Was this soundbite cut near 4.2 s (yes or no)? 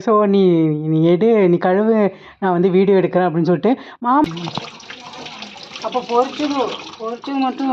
yes